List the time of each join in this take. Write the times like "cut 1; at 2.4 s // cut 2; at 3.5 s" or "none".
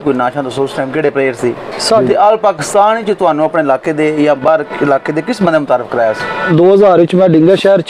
cut 1; at 1.8 s // cut 2; at 6.5 s